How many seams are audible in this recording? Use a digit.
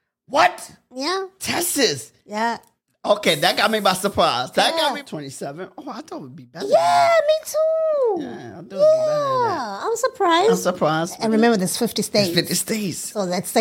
2